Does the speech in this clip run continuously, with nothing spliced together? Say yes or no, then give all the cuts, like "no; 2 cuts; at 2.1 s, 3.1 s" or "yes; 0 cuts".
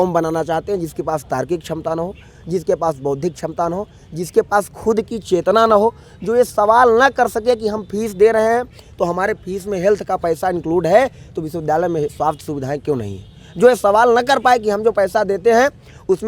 yes; 0 cuts